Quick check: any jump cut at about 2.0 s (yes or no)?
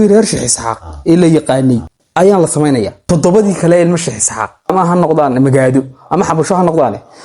yes